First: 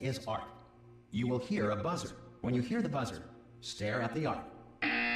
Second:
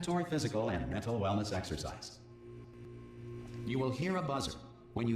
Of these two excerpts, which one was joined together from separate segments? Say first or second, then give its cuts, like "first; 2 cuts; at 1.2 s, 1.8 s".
second; 1 cut; at 3.3 s